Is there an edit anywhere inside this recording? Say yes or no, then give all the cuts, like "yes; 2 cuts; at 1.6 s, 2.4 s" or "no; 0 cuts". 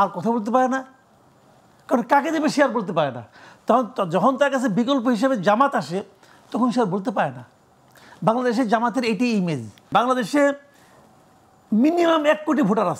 yes; 1 cut; at 9.9 s